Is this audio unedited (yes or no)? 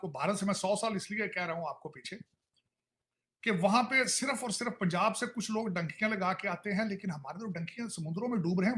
yes